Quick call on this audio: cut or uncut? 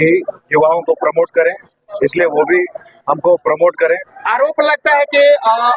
cut